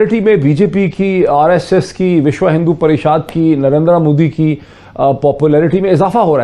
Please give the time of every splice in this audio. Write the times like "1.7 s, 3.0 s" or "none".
none